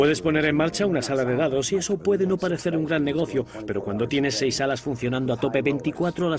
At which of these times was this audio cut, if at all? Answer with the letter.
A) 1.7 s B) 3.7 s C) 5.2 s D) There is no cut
A